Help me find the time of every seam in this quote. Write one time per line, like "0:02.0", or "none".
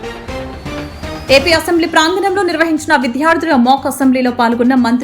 0:01.2